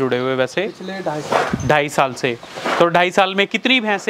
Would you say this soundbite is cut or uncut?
uncut